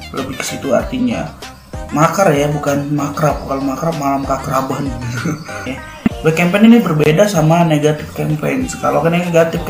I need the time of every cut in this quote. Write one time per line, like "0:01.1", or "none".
0:05.7